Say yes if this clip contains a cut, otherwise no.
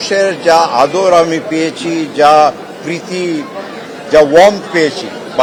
no